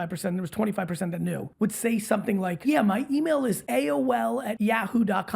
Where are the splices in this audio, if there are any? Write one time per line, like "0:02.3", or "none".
0:01.5
0:02.6
0:03.6
0:04.5